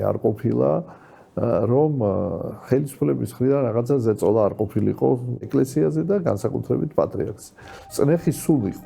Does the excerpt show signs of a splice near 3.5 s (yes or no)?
no